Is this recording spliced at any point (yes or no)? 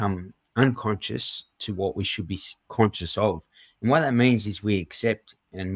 no